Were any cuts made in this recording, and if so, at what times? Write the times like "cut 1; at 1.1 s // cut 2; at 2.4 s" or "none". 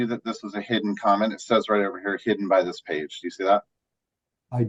none